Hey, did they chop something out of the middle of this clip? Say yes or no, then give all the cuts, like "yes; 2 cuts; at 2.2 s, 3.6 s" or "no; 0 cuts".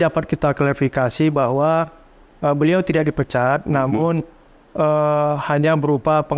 no; 0 cuts